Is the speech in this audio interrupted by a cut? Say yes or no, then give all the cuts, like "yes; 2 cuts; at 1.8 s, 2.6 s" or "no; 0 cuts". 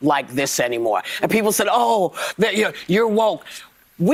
no; 0 cuts